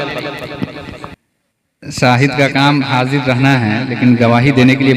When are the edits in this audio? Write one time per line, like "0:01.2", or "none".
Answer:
0:01.1

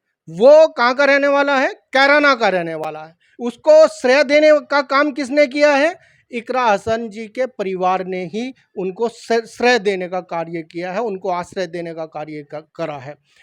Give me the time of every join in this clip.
none

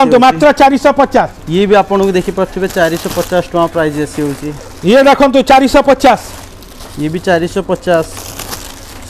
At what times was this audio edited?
none

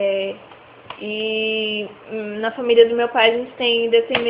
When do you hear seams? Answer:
0:02.9

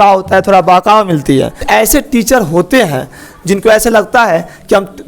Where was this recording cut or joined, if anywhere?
0:01.6

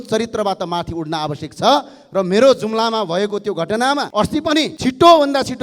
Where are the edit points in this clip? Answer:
none

